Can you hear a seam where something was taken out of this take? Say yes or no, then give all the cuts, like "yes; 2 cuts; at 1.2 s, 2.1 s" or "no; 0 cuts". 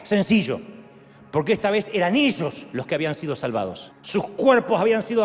yes; 1 cut; at 3.9 s